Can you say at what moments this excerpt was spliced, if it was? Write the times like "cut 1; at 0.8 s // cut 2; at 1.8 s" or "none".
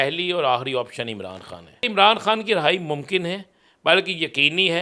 cut 1; at 1.9 s